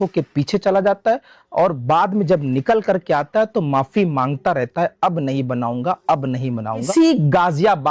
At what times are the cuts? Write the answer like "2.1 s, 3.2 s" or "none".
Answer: 6.9 s